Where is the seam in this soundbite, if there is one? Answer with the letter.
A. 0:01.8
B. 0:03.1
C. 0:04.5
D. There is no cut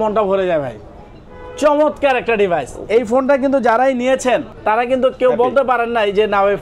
C